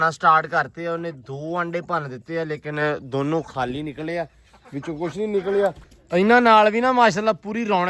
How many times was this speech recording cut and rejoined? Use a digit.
1